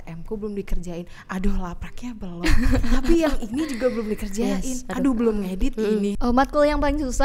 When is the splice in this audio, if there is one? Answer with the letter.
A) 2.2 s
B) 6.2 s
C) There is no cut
B